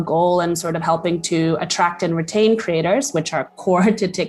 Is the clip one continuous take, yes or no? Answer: yes